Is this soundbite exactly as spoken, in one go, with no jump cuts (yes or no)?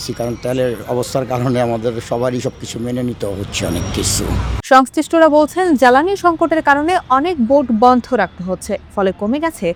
yes